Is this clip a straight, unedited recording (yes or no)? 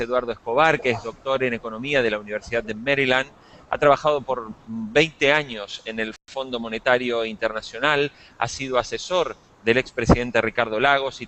yes